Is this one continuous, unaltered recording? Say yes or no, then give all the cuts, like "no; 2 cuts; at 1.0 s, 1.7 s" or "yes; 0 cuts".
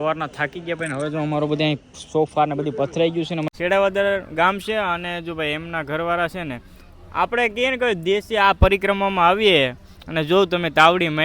no; 1 cut; at 3.5 s